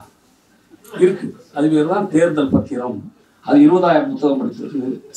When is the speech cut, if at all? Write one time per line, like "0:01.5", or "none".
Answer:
0:03.1